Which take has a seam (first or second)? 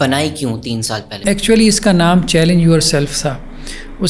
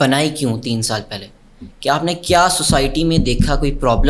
first